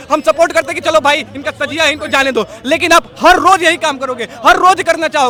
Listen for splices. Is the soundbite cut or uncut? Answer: uncut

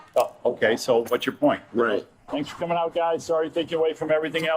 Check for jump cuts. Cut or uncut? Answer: cut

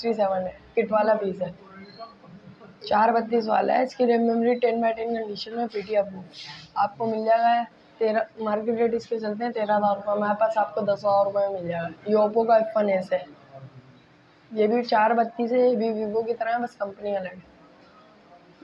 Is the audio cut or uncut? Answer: uncut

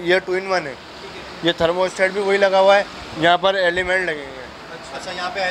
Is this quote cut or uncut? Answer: uncut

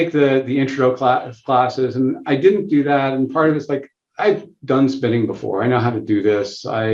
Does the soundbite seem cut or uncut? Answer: uncut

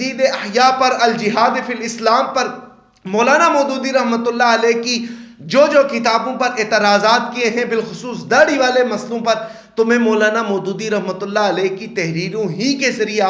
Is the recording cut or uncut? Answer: uncut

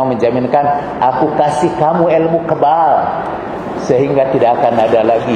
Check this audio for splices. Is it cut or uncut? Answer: uncut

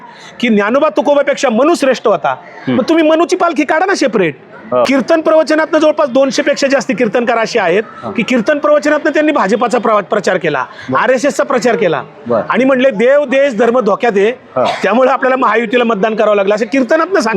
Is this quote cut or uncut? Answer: cut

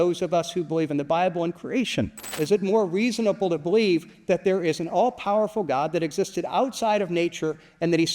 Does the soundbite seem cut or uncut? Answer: cut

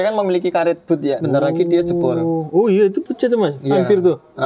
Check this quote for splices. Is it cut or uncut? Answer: cut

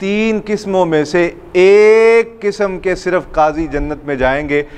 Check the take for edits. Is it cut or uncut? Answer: uncut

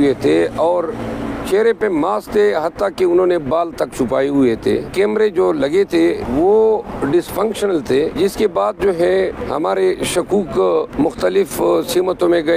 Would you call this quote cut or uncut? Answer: cut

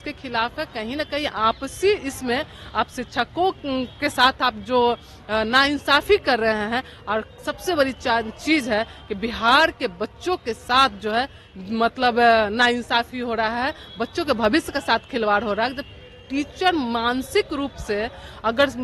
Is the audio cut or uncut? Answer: uncut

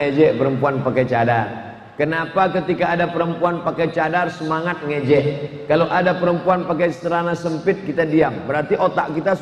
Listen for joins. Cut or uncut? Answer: uncut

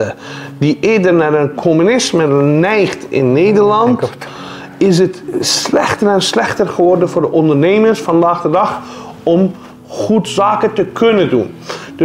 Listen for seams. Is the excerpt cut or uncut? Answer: uncut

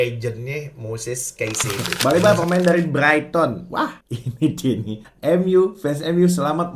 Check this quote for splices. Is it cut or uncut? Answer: cut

